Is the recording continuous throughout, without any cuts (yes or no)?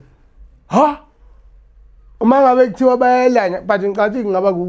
yes